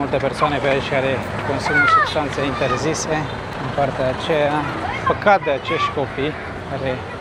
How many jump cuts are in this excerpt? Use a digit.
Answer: 0